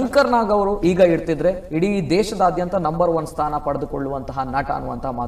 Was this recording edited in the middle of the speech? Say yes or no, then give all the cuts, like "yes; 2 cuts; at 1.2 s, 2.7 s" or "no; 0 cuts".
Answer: no; 0 cuts